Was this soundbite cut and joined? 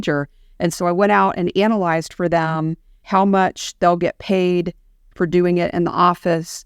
no; 0 cuts

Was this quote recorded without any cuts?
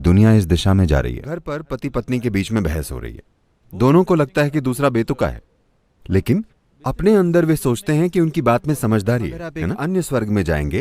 no; 2 cuts; at 1.5 s, 9.6 s

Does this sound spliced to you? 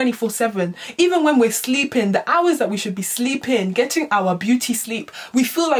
no; 0 cuts

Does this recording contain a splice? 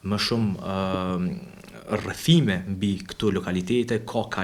no; 0 cuts

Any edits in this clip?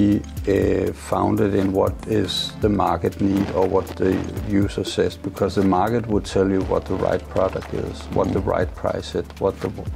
yes; 1 cut; at 5.2 s

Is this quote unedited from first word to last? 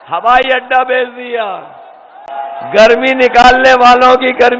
no; 1 cut; at 2.2 s

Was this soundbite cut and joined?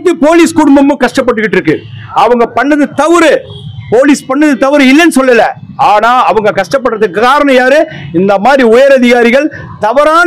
no; 0 cuts

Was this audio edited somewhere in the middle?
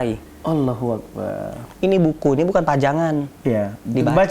yes; 1 cut; at 1.6 s

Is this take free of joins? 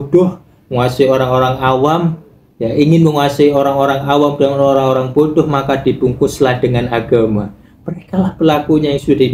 yes; 0 cuts

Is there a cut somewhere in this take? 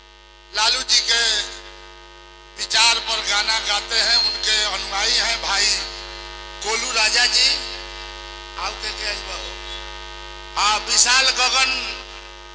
no; 0 cuts

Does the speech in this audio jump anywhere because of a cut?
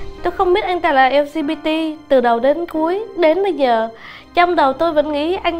no; 0 cuts

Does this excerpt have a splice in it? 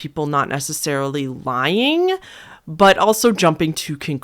no; 0 cuts

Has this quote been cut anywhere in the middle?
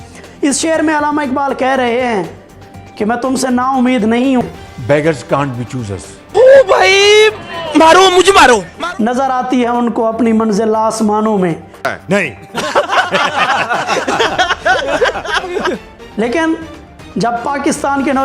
yes; 2 cuts; at 4.4 s, 8.7 s

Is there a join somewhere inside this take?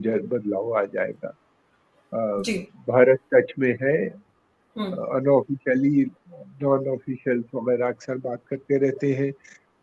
no; 0 cuts

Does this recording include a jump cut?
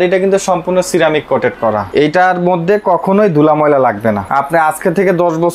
yes; 2 cuts; at 1.9 s, 4.3 s

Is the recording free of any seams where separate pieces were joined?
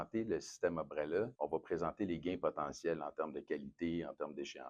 no; 1 cut; at 1.3 s

